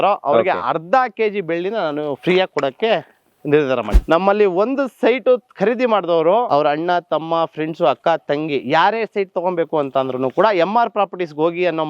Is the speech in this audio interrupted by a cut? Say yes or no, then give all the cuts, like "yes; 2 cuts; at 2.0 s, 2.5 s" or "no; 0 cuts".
yes; 2 cuts; at 4.0 s, 6.5 s